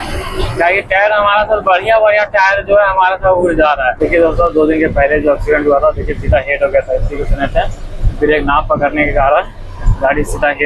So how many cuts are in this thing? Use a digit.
1